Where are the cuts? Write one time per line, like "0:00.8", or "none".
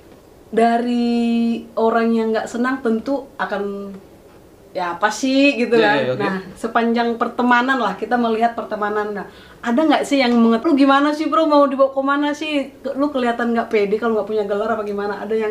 0:10.6